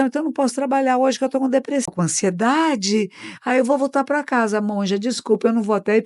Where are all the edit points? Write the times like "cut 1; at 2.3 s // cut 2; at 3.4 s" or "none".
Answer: cut 1; at 1.9 s